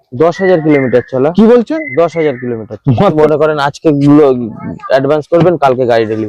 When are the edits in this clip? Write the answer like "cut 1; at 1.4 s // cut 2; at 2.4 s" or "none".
cut 1; at 3.1 s